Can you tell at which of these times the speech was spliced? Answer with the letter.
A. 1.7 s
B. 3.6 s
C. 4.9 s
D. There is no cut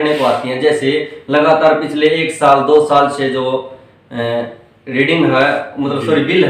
D